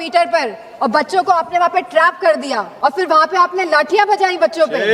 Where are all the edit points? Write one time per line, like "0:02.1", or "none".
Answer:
0:02.7